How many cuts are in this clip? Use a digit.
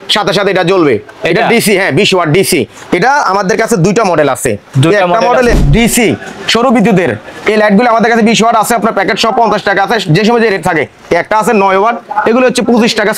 1